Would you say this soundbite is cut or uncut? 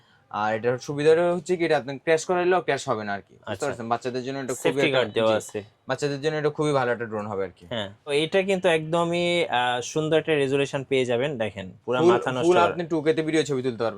cut